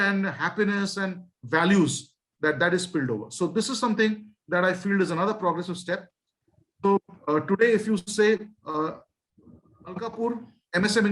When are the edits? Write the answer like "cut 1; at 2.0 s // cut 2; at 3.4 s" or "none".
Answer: none